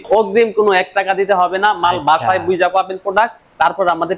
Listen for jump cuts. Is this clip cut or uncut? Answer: uncut